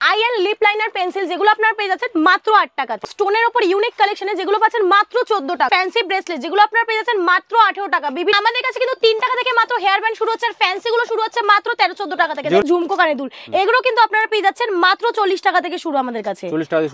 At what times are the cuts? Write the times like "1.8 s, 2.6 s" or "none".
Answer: 3.1 s, 5.7 s, 8.3 s, 12.6 s